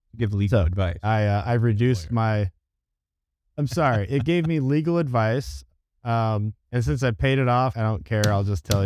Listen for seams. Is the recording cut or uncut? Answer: uncut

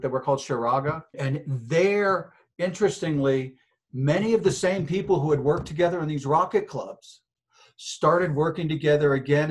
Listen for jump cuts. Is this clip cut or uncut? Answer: cut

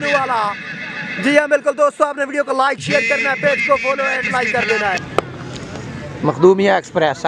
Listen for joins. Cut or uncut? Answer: cut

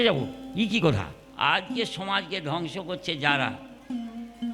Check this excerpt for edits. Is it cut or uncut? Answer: cut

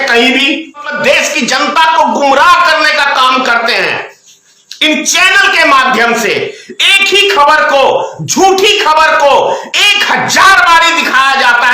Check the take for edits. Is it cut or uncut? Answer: cut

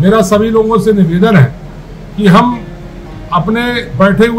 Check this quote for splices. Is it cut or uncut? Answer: uncut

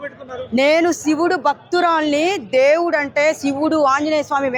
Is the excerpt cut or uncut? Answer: uncut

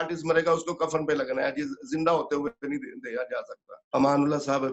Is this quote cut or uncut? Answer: cut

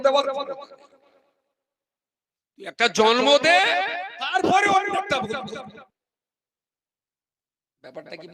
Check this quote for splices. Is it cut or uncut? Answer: cut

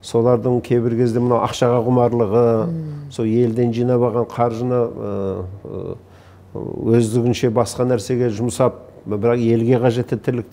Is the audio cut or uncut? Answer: uncut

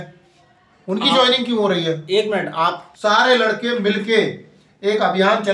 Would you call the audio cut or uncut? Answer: cut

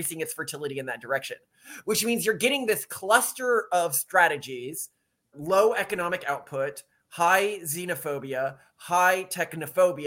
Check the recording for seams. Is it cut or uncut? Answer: cut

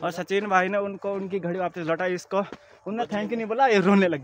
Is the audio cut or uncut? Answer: uncut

